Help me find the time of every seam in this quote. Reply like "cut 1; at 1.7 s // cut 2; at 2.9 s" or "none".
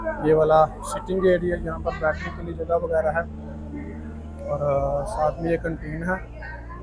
none